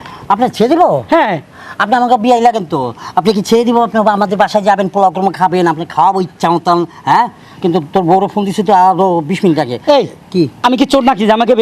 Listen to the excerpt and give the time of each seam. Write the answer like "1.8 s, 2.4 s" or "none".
none